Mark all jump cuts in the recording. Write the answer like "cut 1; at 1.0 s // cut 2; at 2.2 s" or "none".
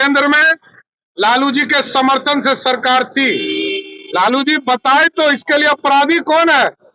none